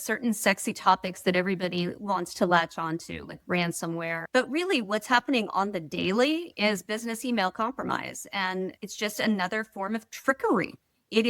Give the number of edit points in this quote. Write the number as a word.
two